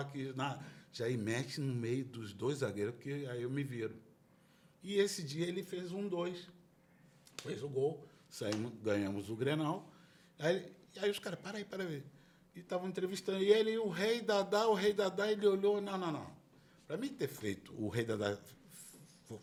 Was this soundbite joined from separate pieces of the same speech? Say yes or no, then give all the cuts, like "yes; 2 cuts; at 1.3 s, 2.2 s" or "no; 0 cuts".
no; 0 cuts